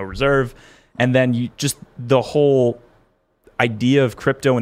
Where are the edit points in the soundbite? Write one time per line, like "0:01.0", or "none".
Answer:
0:01.6